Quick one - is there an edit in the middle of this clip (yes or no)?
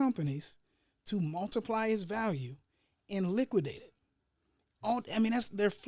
no